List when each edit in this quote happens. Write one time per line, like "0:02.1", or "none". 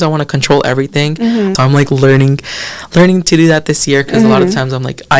0:01.5